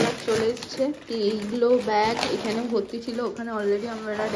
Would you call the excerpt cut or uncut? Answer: uncut